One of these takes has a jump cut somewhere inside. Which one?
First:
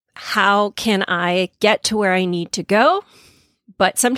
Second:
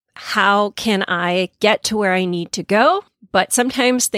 second; 1 cut; at 3.1 s

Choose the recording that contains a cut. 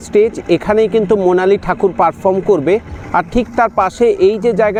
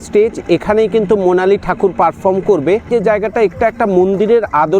second; 1 cut; at 2.9 s

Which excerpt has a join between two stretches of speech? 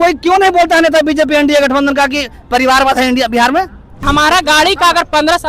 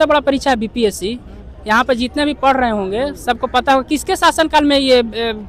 first; 1 cut; at 4.1 s

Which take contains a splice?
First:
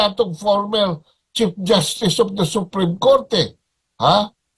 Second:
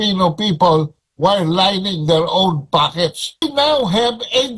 second; 1 cut; at 3.4 s

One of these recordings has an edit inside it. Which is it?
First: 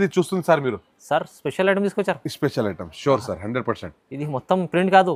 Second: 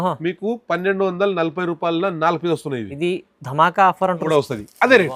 second; 1 cut; at 4.3 s

